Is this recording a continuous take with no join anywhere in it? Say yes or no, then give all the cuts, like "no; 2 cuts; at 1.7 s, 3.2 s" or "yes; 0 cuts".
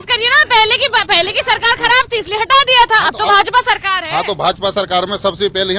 yes; 0 cuts